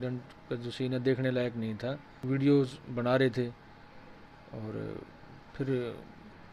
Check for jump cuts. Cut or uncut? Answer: cut